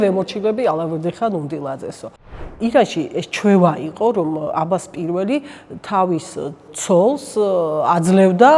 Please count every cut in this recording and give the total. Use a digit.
2